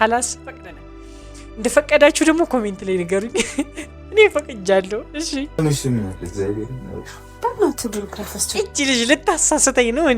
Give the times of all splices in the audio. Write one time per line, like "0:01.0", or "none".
0:05.5